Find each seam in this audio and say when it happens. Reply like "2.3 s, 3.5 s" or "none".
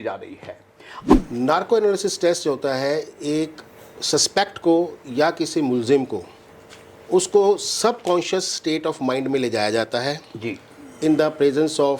1.1 s